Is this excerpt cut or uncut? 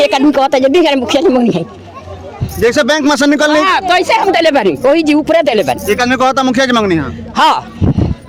uncut